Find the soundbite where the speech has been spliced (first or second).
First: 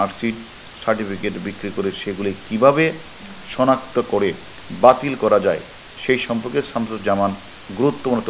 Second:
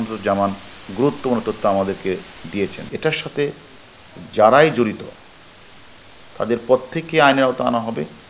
second